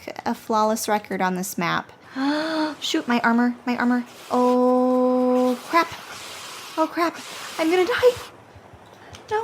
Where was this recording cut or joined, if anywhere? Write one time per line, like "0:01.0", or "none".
0:02.0